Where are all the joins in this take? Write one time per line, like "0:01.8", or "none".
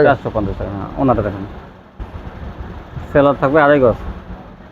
none